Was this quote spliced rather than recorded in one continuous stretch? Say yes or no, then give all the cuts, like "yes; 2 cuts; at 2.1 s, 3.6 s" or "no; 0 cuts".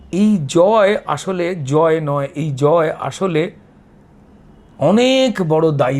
no; 0 cuts